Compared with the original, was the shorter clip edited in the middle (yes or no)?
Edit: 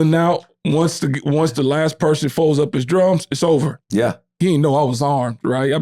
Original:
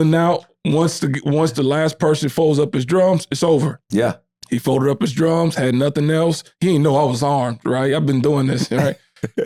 yes